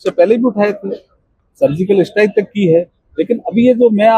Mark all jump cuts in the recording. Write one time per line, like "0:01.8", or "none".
none